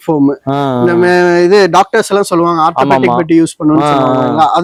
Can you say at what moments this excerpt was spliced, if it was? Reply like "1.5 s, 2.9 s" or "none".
none